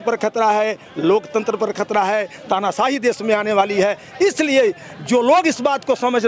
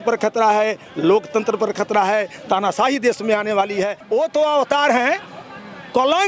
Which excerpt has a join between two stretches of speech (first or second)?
second